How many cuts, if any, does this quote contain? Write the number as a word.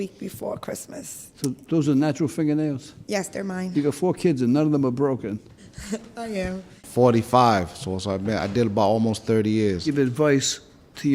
one